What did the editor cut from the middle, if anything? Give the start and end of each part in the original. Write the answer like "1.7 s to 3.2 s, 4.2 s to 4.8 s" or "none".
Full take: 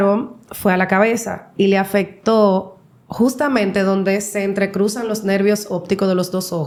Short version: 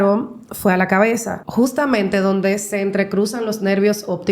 1.4 s to 3.0 s